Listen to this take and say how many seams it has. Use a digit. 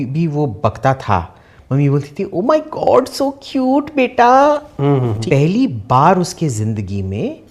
1